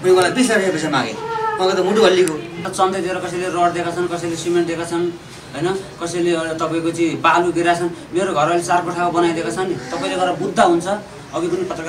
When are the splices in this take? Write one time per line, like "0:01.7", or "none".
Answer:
0:02.7